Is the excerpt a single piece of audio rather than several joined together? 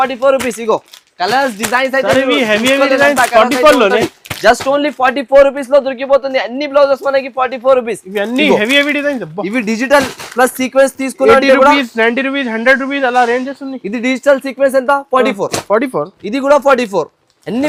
yes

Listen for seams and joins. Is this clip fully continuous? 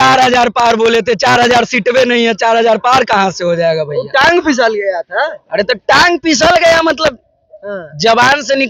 yes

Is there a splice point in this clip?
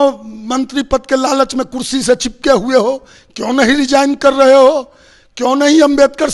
no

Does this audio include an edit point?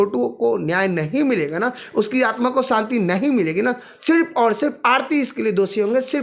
no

